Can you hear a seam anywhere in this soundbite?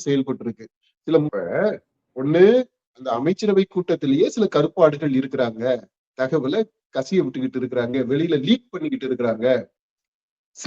yes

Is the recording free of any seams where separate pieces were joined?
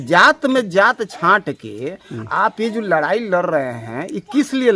yes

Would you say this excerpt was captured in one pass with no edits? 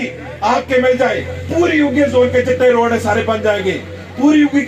yes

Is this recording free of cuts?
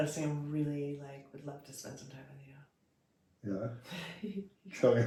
yes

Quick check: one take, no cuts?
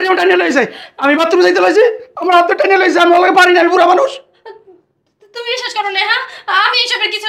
yes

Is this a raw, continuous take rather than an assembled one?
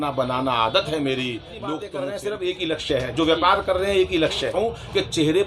no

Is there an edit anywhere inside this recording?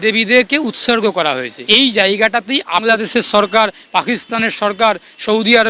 yes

